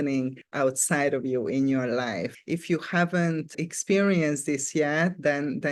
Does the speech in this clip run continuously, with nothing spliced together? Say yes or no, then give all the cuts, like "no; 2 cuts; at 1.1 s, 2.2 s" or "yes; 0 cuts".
yes; 0 cuts